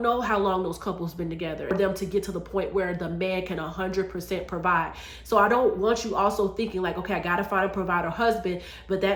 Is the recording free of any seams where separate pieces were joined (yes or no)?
yes